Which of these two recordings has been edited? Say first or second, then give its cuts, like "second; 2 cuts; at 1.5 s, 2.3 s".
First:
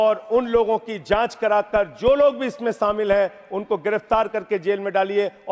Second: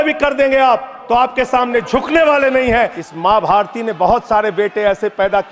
second; 1 cut; at 3.0 s